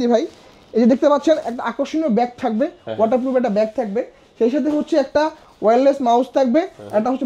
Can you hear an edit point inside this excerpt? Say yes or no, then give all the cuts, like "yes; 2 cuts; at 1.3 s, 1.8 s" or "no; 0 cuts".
no; 0 cuts